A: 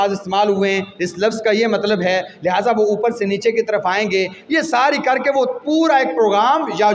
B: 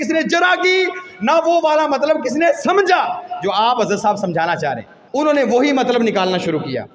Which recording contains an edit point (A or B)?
B